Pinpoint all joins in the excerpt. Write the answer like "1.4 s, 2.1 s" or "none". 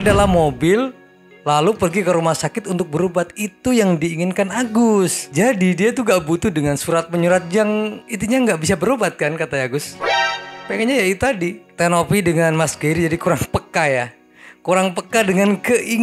none